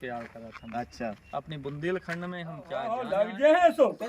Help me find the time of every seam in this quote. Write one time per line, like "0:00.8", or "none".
0:03.0